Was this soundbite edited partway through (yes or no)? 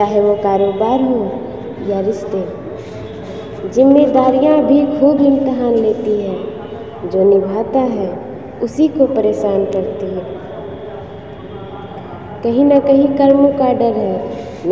no